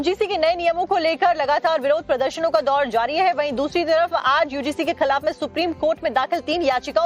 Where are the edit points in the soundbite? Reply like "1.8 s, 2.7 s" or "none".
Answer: 2.0 s